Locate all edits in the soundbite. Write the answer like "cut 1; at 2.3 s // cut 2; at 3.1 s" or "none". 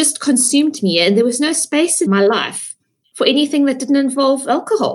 cut 1; at 2.1 s